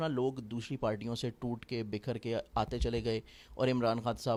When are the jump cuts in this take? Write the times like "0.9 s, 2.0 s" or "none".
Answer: none

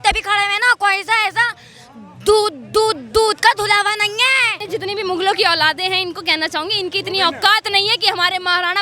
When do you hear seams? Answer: 4.6 s

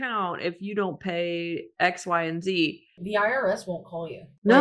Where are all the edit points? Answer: 2.9 s

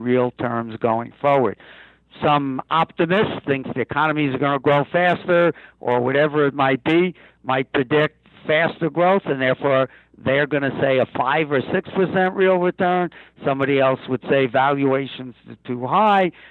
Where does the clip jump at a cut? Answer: none

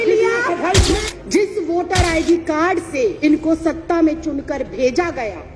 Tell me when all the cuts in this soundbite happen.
1.0 s, 3.2 s

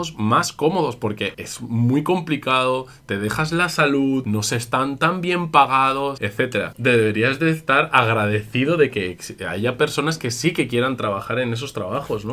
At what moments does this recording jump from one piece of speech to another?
6.7 s

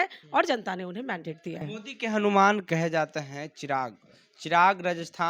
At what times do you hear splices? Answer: 1.7 s

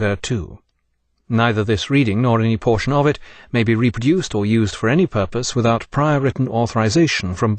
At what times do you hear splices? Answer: 2.1 s

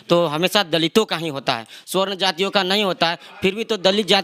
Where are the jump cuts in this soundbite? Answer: none

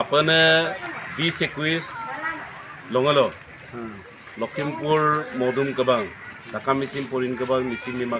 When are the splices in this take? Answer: 1.0 s

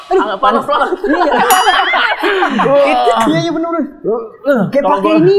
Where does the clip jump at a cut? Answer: none

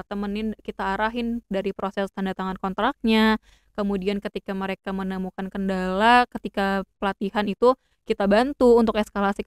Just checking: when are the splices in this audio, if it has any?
none

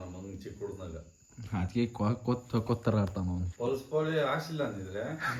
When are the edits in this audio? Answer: none

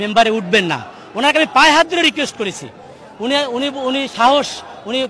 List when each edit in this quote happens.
none

